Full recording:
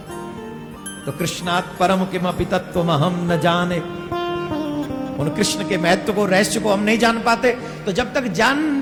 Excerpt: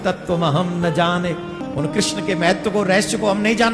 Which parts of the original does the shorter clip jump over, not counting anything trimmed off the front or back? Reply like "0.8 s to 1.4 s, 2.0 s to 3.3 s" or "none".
4.1 s to 5.0 s